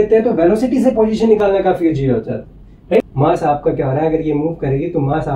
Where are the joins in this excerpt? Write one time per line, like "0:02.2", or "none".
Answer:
0:03.1